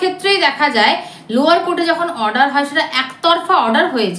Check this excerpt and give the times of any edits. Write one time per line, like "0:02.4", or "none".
none